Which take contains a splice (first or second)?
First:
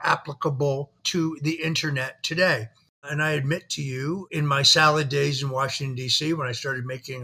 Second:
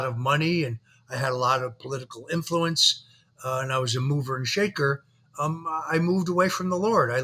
first